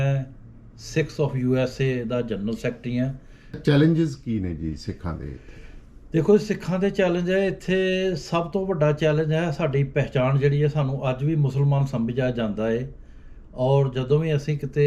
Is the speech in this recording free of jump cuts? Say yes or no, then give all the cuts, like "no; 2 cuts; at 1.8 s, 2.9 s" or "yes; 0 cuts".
no; 1 cut; at 3.6 s